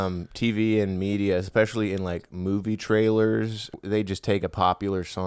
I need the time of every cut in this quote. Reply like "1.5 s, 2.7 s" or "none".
3.6 s

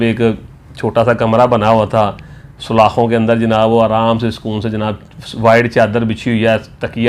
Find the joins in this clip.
none

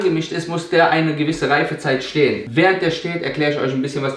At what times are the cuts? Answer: 2.4 s

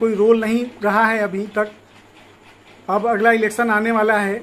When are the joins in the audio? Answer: none

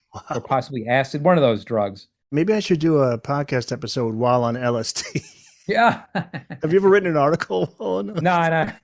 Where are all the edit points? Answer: 2.3 s

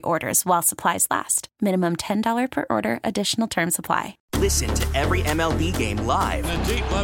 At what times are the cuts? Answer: 4.2 s

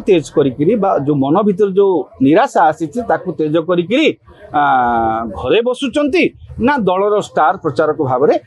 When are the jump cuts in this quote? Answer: none

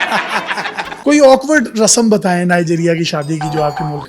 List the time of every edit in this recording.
0.9 s

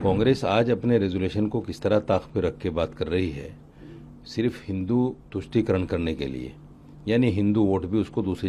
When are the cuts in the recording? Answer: none

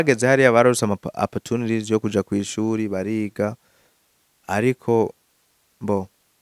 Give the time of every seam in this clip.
none

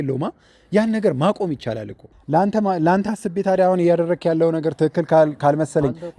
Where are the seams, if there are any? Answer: 2.1 s

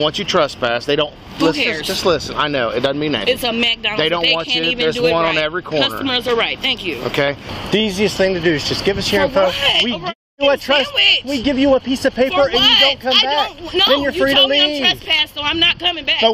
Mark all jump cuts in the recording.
7.5 s

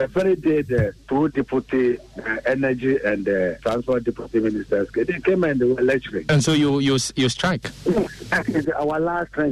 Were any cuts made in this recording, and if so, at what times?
3.6 s, 6.2 s

